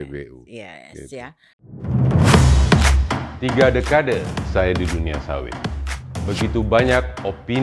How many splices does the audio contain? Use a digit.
1